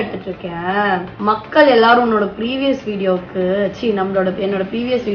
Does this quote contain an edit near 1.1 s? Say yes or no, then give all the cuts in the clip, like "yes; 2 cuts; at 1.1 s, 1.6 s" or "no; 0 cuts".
yes; 1 cut; at 1.1 s